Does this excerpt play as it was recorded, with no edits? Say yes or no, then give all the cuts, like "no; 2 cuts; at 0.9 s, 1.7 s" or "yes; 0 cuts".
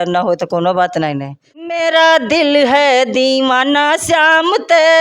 no; 1 cut; at 1.3 s